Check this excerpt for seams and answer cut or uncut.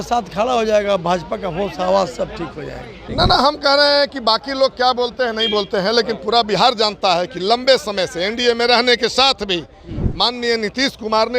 cut